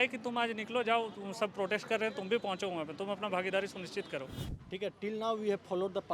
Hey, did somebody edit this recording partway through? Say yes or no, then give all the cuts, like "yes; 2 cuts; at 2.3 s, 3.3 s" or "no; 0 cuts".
yes; 1 cut; at 4.5 s